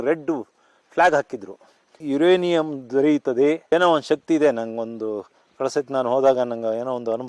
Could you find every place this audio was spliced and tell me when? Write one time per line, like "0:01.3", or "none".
0:03.7

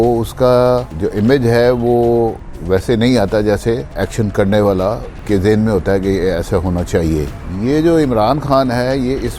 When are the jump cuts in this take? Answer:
0:01.0
0:02.5
0:04.0
0:05.2
0:07.4

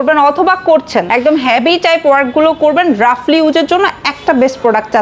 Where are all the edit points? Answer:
none

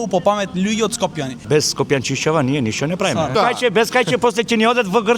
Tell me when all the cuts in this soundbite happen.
0:01.4
0:03.4

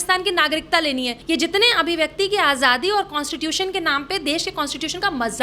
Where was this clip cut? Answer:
0:01.1

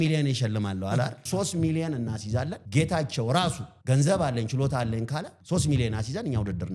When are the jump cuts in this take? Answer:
0:01.2
0:02.6
0:03.7
0:05.4

